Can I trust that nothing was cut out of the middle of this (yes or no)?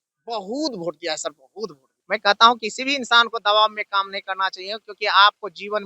no